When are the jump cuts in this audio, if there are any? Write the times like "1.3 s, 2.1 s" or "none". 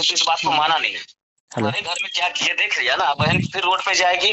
1.5 s